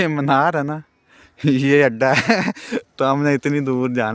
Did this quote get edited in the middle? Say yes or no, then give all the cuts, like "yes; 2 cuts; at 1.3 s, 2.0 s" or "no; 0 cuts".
no; 0 cuts